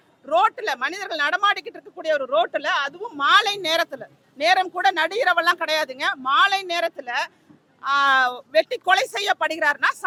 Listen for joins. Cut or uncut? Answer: uncut